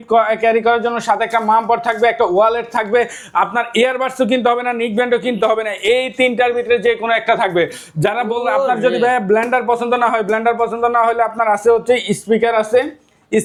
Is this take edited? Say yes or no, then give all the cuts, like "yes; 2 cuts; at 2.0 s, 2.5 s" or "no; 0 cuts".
no; 0 cuts